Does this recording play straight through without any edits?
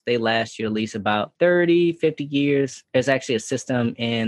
no; 1 cut; at 1.3 s

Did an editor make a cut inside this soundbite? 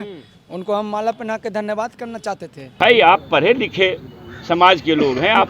yes; 1 cut; at 2.8 s

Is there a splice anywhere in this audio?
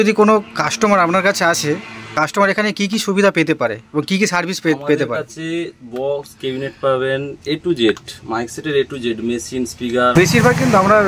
yes; 2 cuts; at 2.1 s, 10.1 s

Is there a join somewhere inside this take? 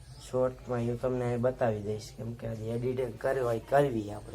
yes; 1 cut; at 1.8 s

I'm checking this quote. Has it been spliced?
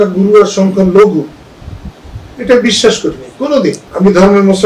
no; 0 cuts

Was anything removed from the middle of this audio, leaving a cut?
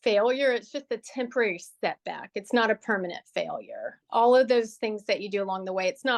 no; 0 cuts

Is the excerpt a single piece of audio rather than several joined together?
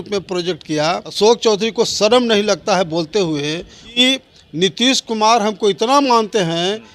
no; 2 cuts; at 1.1 s, 4.0 s

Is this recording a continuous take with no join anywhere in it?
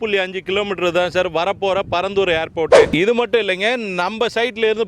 no; 1 cut; at 2.9 s

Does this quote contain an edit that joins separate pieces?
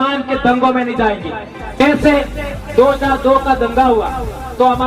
yes; 1 cut; at 1.6 s

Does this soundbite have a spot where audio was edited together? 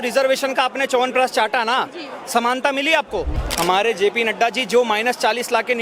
yes; 1 cut; at 3.4 s

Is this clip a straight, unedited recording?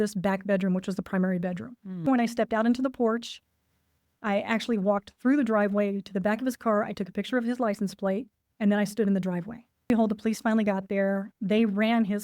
no; 2 cuts; at 2.0 s, 9.9 s

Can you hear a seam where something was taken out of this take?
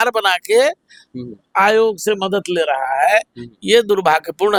no; 0 cuts

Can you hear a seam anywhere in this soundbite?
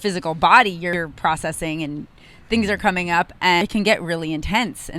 yes; 2 cuts; at 0.9 s, 3.6 s

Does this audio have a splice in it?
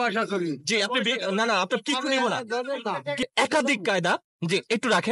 yes; 1 cut; at 3.3 s

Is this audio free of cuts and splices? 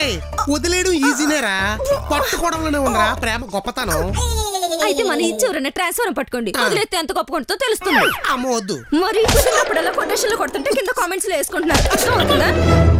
yes; 0 cuts

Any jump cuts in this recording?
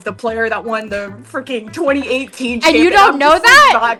no; 0 cuts

